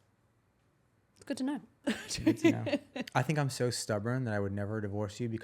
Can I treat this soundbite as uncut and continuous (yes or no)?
no